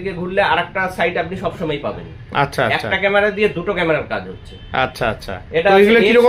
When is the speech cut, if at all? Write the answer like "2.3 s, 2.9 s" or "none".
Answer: none